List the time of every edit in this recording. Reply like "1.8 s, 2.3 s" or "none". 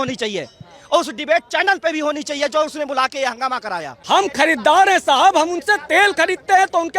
3.9 s